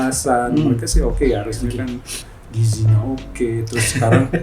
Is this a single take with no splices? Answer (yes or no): yes